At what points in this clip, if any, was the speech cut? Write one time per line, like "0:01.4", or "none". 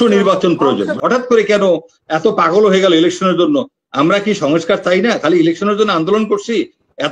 0:01.0